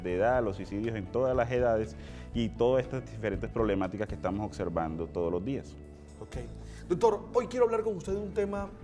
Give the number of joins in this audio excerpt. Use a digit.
1